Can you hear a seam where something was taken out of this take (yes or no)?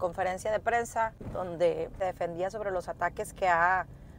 yes